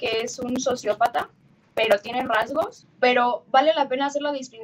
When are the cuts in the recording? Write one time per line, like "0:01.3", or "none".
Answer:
0:02.8

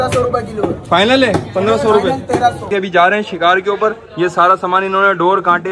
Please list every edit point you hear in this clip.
0:02.7

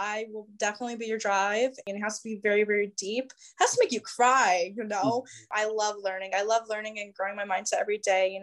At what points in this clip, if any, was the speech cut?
0:01.8
0:05.5

